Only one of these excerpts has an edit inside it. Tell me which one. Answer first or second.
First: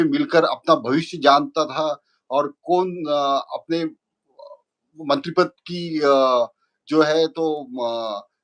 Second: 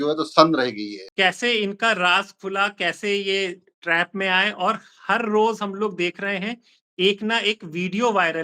second